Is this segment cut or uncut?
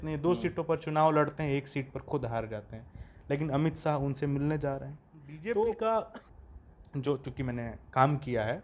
uncut